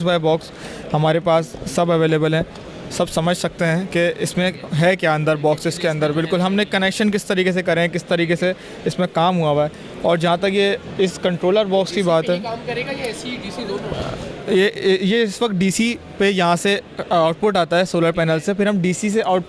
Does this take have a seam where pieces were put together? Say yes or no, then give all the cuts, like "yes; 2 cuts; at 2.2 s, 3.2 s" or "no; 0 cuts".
no; 0 cuts